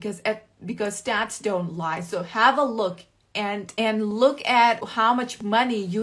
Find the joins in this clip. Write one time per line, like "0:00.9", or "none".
0:03.7
0:04.9